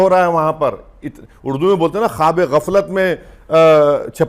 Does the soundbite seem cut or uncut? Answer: uncut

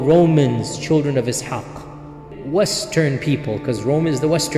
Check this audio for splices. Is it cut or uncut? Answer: cut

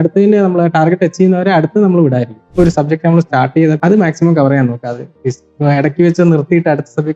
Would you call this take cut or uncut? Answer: cut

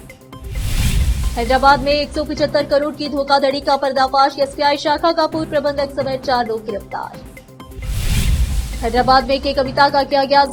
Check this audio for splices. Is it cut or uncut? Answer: uncut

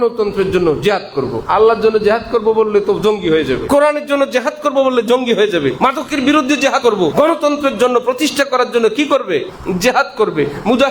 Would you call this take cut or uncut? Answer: cut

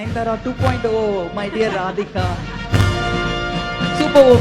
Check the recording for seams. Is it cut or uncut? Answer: uncut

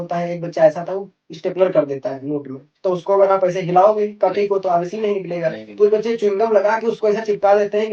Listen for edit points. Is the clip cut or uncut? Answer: uncut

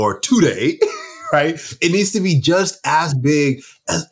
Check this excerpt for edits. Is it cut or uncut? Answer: uncut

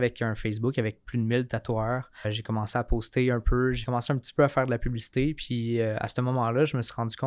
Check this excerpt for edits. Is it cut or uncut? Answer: cut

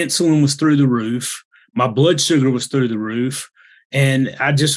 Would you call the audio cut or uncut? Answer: uncut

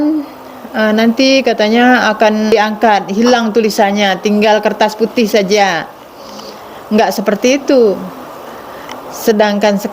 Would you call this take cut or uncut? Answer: cut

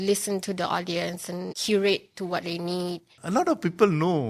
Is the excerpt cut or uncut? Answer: cut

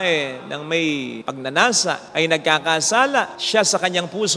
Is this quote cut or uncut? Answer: cut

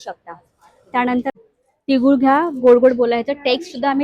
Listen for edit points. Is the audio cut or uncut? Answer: cut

